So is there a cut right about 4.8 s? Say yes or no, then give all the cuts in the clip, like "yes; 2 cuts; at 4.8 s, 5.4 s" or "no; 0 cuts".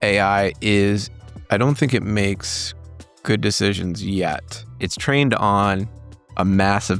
yes; 1 cut; at 4.8 s